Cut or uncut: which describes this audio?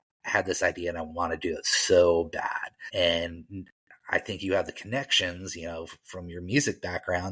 uncut